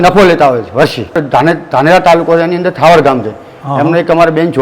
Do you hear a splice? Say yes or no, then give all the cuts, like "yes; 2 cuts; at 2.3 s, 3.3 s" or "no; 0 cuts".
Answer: yes; 1 cut; at 1.2 s